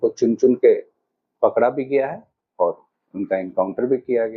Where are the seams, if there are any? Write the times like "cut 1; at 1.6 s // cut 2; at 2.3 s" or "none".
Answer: none